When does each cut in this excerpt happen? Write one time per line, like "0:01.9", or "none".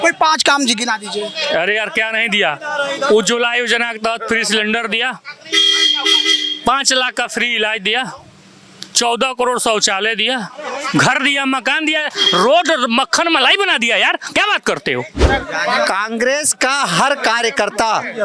0:15.3